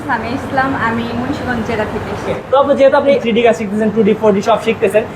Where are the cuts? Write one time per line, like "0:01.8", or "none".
0:02.3
0:03.2